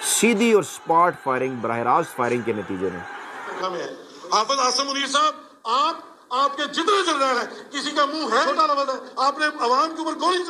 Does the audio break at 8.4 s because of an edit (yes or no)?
yes